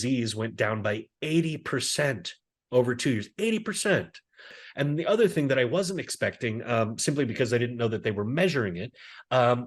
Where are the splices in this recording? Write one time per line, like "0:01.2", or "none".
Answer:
0:04.5